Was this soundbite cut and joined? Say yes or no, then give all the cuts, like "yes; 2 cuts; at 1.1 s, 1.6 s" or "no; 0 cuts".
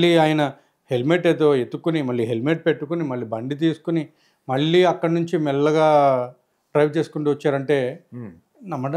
no; 0 cuts